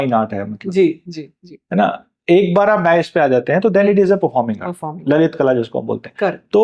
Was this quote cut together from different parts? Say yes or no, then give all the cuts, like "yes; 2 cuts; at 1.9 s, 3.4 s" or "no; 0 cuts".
no; 0 cuts